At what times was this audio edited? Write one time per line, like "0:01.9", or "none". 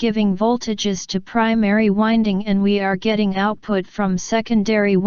none